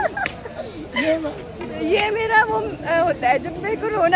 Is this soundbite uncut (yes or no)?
yes